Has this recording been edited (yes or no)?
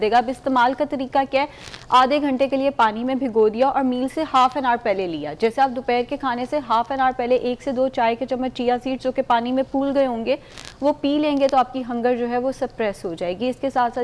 no